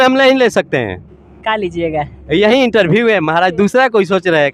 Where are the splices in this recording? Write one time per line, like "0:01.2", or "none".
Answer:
none